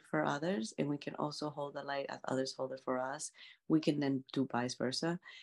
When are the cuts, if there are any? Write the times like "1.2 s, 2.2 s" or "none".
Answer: none